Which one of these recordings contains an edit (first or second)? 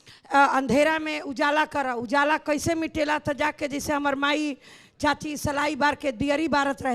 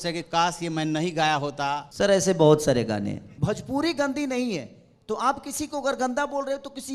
second